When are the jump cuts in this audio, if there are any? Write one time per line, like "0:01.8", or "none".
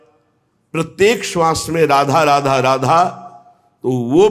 none

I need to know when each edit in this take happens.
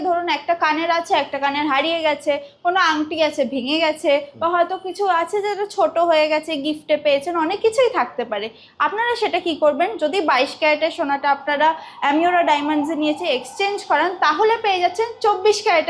none

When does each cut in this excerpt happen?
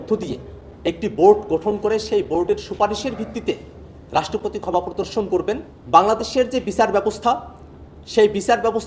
0:05.7

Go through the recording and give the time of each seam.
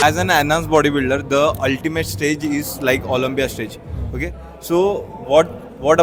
none

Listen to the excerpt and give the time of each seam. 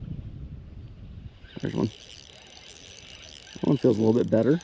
none

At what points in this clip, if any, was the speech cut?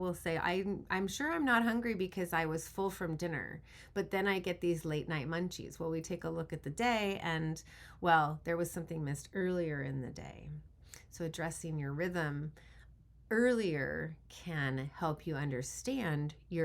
none

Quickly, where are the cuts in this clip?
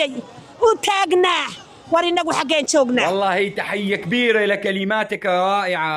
0:03.0

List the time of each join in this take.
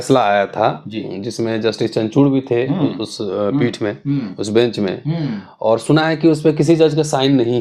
none

